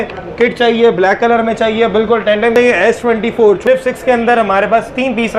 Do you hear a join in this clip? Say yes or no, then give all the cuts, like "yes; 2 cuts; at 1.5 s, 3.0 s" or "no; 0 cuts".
yes; 2 cuts; at 2.5 s, 3.6 s